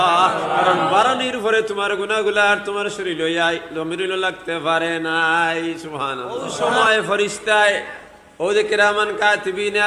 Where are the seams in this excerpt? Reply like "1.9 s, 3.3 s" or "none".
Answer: 6.8 s